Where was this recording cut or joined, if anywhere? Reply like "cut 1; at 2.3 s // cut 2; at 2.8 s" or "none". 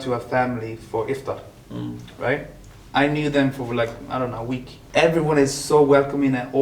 cut 1; at 4.7 s